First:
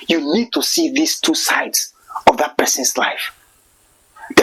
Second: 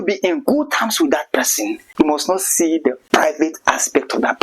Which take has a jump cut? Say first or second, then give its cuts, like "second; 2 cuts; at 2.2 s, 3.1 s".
second; 1 cut; at 1.8 s